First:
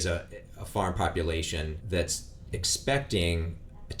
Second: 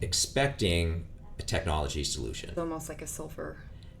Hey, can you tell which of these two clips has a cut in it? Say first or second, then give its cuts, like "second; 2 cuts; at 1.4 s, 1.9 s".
second; 1 cut; at 2.6 s